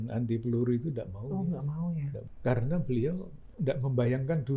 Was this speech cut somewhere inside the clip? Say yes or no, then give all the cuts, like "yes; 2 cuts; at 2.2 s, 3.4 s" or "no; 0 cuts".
yes; 2 cuts; at 2.3 s, 3.4 s